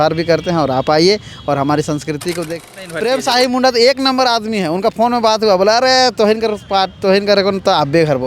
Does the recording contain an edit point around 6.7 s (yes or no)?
no